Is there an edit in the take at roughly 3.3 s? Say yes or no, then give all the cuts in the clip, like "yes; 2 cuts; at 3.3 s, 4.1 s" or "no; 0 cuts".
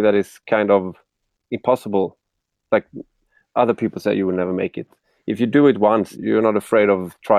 no; 1 cut; at 6.1 s